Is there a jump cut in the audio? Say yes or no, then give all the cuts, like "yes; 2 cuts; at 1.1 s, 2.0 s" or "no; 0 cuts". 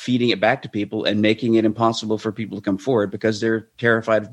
no; 0 cuts